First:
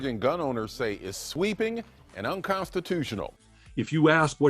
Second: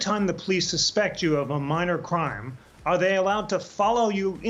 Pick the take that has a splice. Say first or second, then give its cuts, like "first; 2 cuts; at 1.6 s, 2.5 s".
first; 1 cut; at 3.4 s